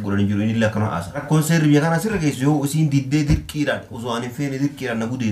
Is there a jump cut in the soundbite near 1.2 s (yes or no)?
yes